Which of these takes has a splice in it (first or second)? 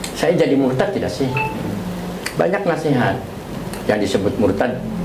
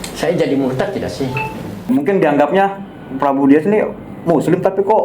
second